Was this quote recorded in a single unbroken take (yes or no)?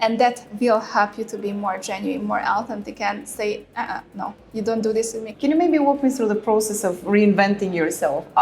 no